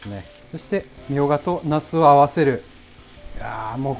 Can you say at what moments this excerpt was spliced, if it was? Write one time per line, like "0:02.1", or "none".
0:00.9